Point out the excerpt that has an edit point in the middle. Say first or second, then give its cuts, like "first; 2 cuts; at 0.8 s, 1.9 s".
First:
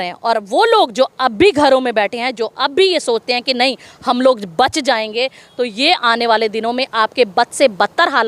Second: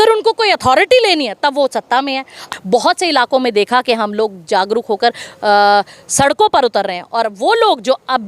second; 1 cut; at 2.5 s